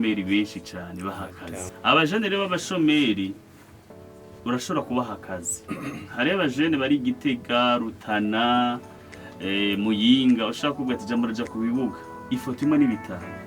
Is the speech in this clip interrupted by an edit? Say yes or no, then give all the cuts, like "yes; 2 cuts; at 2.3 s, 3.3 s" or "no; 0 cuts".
yes; 1 cut; at 1.7 s